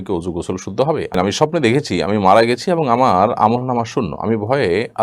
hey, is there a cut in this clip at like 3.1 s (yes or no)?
no